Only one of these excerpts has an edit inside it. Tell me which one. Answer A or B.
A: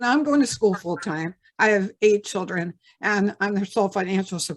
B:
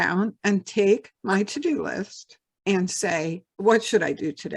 B